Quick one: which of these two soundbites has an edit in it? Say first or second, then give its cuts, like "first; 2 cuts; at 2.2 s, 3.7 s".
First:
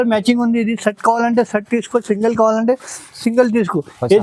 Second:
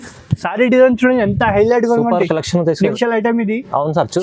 second; 1 cut; at 3.0 s